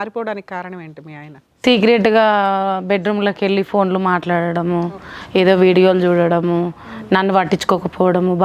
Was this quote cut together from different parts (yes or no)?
no